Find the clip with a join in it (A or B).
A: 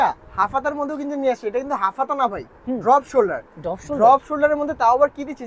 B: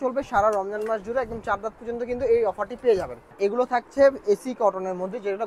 B